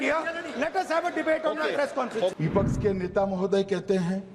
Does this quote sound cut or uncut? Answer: cut